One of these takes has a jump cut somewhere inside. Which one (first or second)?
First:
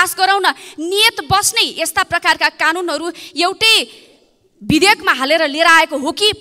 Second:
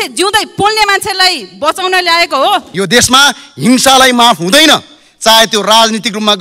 second